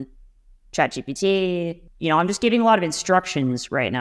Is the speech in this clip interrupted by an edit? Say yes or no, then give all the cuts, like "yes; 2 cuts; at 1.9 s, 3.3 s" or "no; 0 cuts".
yes; 1 cut; at 1.8 s